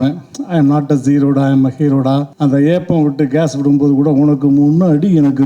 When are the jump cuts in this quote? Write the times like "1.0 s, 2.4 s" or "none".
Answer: 2.3 s